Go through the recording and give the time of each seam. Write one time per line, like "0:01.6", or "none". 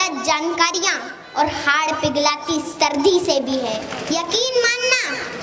0:03.9